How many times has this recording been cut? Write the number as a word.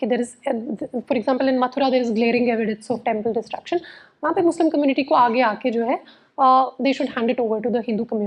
zero